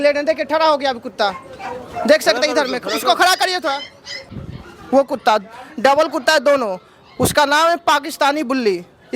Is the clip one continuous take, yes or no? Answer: no